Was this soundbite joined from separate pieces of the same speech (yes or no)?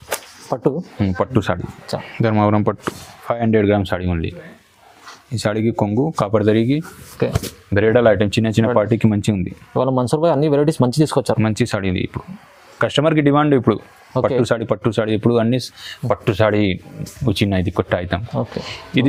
no